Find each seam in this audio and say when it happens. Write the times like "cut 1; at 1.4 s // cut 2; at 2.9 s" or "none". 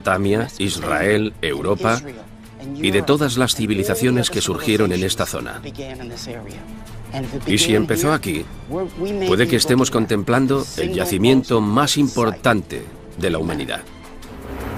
cut 1; at 7.8 s